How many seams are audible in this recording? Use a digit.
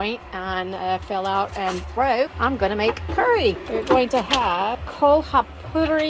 3